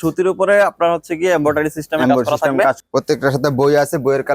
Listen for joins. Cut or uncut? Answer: cut